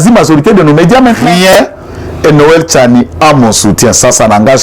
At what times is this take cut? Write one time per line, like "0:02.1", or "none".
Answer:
0:01.3